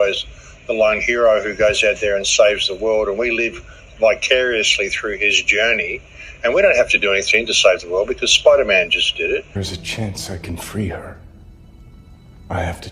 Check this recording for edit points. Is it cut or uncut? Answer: cut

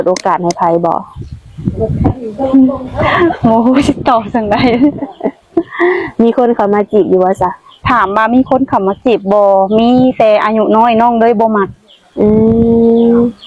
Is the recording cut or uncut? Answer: uncut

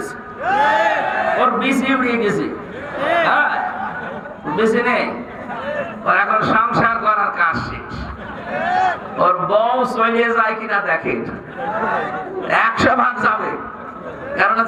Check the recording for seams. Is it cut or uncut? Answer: uncut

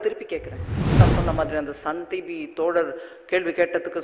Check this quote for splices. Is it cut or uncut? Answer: cut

